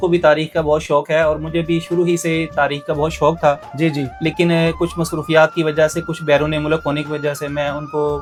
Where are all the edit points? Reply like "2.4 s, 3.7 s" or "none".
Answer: none